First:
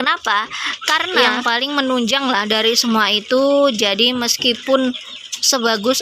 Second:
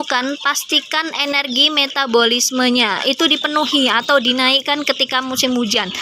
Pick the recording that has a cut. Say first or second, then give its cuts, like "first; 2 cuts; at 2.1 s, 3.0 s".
first; 1 cut; at 1.1 s